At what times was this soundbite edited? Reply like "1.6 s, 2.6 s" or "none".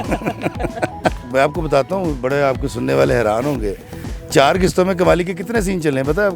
none